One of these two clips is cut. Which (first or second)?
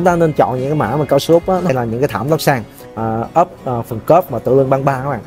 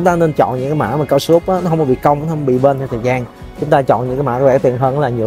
first